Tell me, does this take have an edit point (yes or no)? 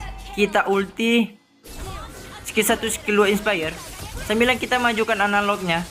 no